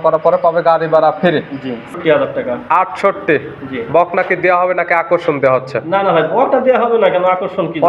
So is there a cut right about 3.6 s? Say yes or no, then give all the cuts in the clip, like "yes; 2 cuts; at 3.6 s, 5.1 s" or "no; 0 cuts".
no; 1 cut; at 1.9 s